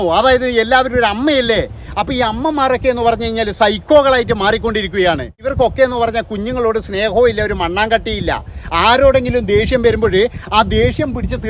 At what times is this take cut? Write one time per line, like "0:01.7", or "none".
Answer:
0:05.5